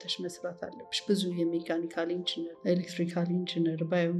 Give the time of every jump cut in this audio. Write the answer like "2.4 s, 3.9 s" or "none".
2.5 s